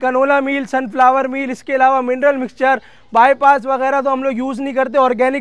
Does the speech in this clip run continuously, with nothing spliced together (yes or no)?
yes